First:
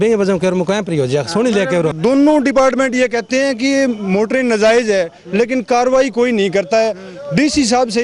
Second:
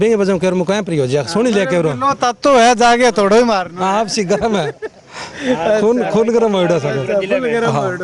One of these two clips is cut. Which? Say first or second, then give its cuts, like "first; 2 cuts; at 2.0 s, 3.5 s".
first; 1 cut; at 1.9 s